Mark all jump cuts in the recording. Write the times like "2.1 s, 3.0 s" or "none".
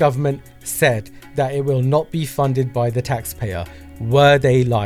none